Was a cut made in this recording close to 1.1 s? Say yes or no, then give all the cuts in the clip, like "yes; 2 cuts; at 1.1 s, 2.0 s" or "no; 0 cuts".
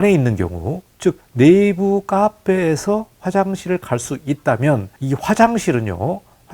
yes; 2 cuts; at 1.1 s, 4.9 s